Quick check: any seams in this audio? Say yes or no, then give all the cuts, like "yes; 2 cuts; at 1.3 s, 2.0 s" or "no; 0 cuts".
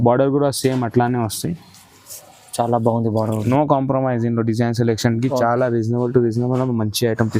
yes; 1 cut; at 3.4 s